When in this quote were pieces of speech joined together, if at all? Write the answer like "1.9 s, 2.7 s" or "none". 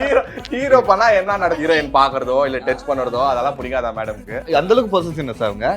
1.6 s, 4.5 s